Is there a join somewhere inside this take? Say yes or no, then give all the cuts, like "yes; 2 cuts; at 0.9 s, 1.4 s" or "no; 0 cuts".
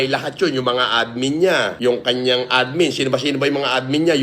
yes; 1 cut; at 1.8 s